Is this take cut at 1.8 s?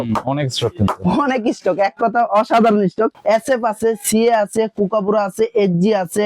no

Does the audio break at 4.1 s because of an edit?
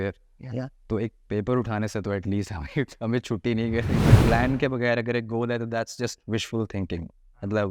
yes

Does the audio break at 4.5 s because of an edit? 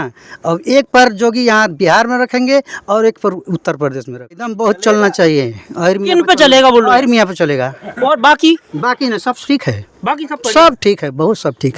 yes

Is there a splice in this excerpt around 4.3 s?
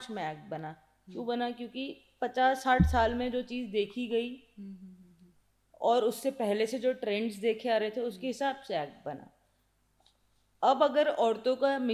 no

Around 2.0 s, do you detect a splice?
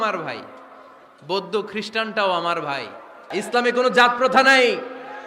no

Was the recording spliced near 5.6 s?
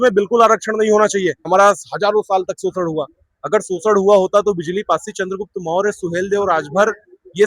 no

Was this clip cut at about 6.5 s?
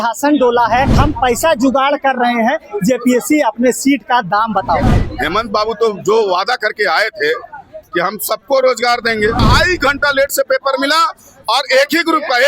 no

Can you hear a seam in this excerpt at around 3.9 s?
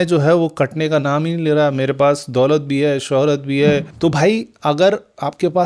yes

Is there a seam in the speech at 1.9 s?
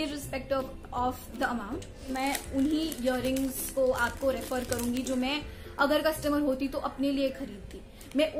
yes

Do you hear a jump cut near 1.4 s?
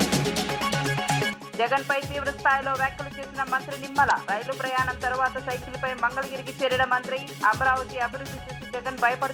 yes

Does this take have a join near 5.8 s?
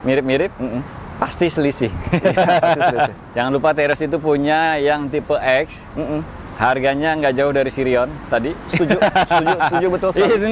no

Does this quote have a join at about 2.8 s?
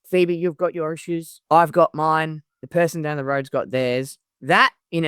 no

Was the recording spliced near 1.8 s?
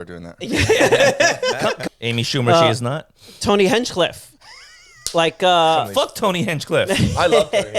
yes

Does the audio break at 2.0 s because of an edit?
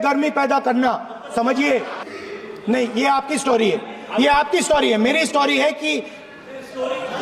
yes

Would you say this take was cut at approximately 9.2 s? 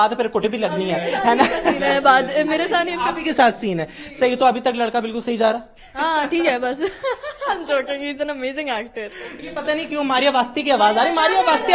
yes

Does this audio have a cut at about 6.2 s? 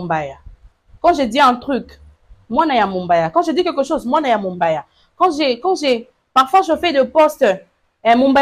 no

